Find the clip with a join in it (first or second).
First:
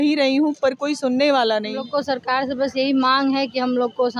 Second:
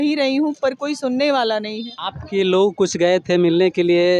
first